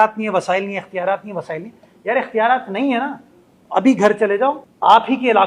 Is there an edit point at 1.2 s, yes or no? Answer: no